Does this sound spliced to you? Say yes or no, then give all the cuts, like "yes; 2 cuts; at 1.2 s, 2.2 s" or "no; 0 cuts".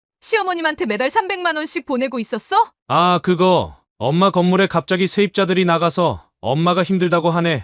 yes; 1 cut; at 2.8 s